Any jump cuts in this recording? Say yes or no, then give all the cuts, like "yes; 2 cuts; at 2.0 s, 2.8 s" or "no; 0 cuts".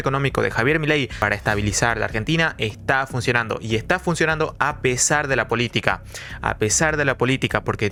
no; 0 cuts